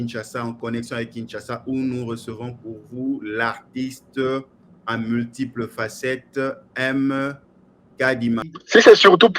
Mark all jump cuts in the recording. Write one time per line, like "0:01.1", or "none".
0:08.4